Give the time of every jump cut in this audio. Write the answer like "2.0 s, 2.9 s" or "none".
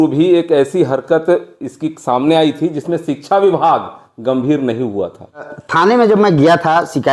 5.6 s